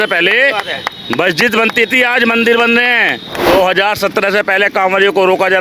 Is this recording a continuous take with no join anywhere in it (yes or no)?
yes